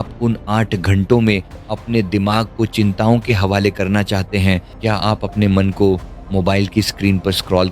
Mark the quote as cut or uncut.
cut